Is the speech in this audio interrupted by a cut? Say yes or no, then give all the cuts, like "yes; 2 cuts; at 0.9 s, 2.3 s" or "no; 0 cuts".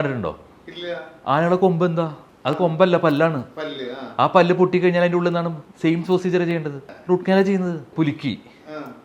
no; 0 cuts